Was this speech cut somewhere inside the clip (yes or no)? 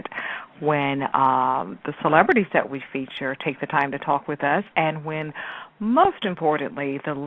no